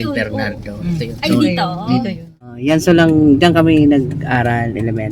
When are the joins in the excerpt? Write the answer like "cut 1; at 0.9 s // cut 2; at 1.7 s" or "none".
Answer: cut 1; at 2.5 s